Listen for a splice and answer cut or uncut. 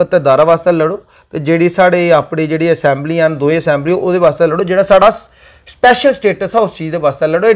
uncut